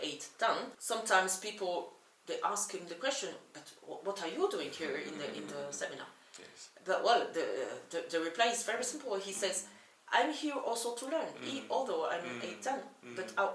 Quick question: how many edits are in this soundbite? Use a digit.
0